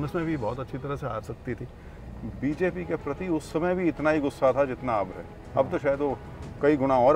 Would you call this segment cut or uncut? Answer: cut